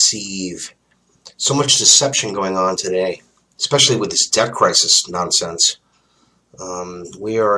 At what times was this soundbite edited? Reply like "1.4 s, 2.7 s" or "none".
none